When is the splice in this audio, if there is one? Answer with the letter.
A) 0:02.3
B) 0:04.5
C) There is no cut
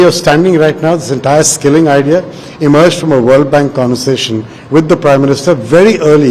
C